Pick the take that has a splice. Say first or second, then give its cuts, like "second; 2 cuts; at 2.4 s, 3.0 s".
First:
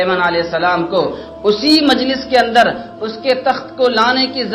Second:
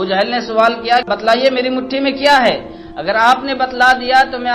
second; 1 cut; at 1.1 s